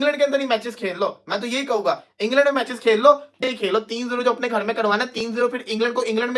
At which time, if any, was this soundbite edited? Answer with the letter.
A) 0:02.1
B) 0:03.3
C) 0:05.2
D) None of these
B